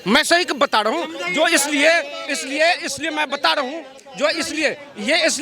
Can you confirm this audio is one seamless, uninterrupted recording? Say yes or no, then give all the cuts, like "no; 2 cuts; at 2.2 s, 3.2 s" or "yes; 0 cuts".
yes; 0 cuts